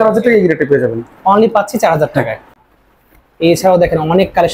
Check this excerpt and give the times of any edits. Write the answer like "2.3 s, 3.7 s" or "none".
none